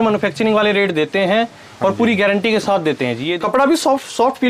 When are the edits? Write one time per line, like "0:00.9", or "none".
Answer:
0:03.3